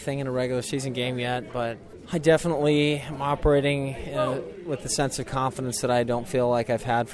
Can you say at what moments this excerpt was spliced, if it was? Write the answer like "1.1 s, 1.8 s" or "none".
1.9 s

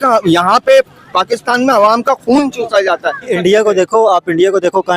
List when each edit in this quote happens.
3.3 s

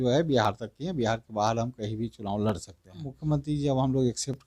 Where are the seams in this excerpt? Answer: 3.2 s

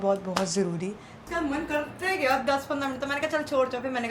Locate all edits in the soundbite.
1.2 s

